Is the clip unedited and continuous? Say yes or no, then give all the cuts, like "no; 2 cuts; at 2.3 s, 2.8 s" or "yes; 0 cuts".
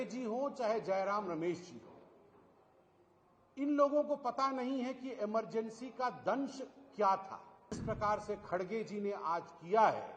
no; 1 cut; at 7.8 s